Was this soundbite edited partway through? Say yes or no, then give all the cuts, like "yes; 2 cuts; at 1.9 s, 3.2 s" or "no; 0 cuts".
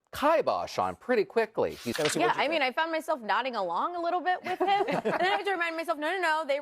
yes; 1 cut; at 1.8 s